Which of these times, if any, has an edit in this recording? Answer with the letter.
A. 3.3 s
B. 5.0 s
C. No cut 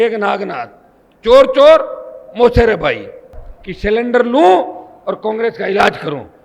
A